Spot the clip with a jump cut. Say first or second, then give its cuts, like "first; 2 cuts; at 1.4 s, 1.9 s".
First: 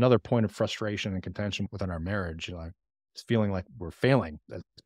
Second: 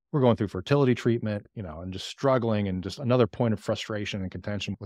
second; 1 cut; at 1.5 s